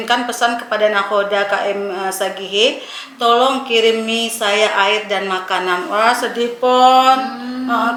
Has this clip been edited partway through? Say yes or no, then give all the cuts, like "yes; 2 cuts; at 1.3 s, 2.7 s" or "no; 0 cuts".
no; 0 cuts